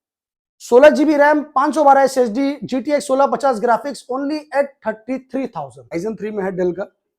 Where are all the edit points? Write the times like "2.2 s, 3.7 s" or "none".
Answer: 5.9 s